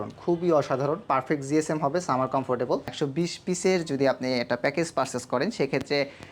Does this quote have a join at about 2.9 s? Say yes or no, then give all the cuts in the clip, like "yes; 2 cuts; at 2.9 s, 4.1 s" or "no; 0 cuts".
yes; 1 cut; at 2.9 s